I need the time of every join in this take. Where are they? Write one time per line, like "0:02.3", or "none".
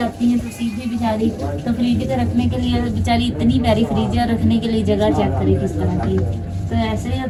none